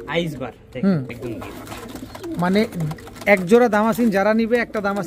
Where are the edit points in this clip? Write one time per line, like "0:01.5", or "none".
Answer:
0:01.1